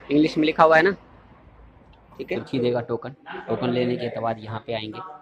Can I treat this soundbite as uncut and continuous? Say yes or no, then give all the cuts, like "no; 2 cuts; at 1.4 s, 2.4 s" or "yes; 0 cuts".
no; 1 cut; at 2.4 s